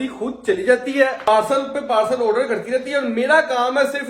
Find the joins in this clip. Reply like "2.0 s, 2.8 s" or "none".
1.2 s